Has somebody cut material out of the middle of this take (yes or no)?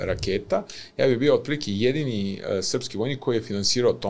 no